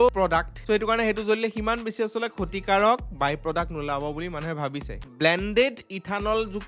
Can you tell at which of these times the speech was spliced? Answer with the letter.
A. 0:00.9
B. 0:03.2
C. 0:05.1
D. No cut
C